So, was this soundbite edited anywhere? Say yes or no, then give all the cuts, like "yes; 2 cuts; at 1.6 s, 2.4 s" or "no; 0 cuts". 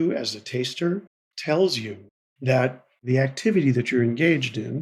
yes; 2 cuts; at 1.2 s, 3.1 s